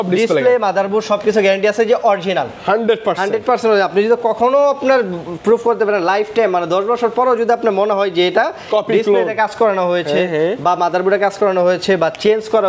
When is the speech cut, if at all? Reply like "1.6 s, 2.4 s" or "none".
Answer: none